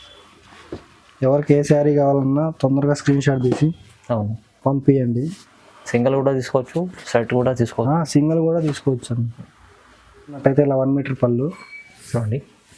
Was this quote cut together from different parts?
yes; 1 cut; at 10.4 s

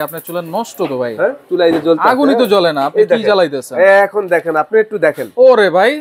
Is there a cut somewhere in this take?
yes; 2 cuts; at 1.4 s, 4.7 s

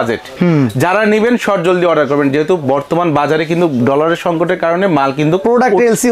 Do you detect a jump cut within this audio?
no; 0 cuts

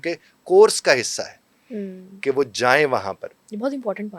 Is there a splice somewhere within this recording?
no; 0 cuts

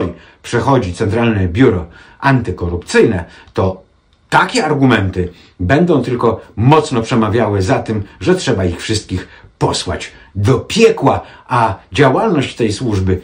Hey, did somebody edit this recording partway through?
no; 0 cuts

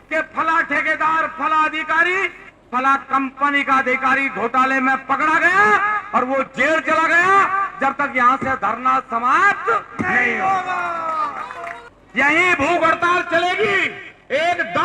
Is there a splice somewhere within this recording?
yes; 1 cut; at 11.9 s

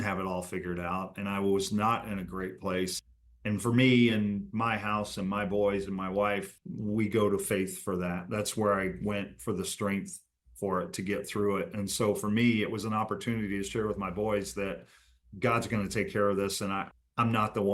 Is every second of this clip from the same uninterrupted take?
no; 2 cuts; at 3.0 s, 6.5 s

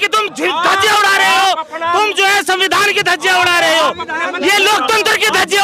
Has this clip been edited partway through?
no; 0 cuts

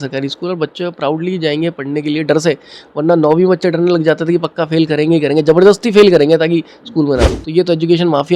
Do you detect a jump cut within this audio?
yes; 1 cut; at 7.4 s

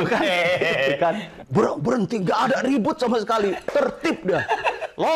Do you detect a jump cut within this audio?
yes; 1 cut; at 1.3 s

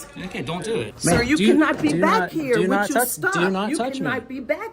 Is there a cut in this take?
yes; 1 cut; at 0.9 s

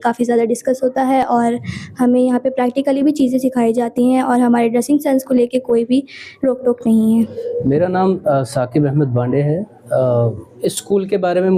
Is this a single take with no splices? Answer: yes; 0 cuts

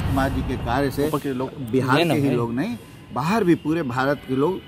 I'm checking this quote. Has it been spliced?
no; 0 cuts

